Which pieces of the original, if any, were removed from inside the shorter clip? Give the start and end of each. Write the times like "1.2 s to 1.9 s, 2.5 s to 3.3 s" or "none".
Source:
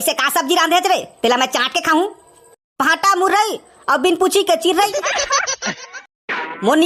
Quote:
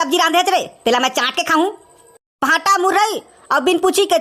none